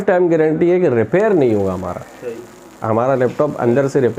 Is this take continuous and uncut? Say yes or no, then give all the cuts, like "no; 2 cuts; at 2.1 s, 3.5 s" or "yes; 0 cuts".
yes; 0 cuts